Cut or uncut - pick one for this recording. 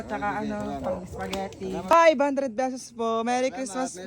cut